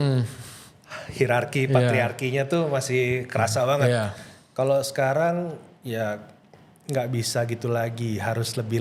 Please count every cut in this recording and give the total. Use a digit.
0